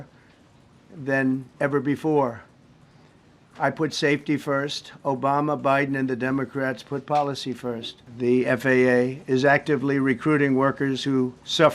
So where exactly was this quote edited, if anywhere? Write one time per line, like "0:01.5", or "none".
0:08.0